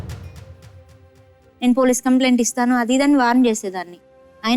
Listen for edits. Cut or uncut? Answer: cut